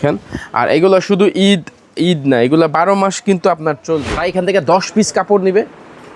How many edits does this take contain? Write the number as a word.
one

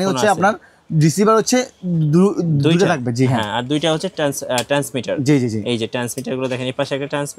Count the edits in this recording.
zero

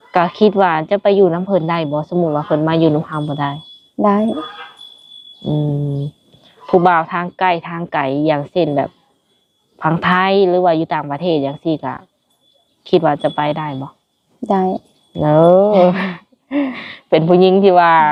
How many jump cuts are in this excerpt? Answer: zero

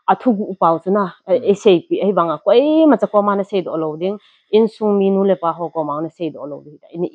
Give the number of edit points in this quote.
zero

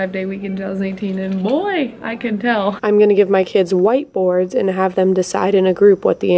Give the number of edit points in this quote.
one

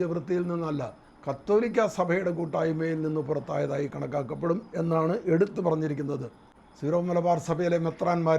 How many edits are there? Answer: one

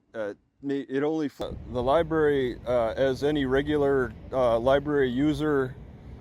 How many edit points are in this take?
one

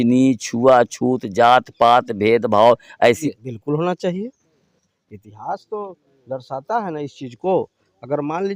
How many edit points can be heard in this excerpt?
one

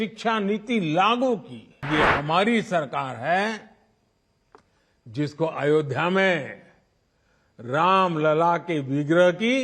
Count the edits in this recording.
one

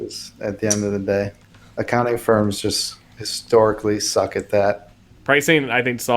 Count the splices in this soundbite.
two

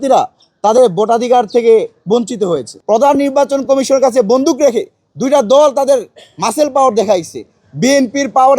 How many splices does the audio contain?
one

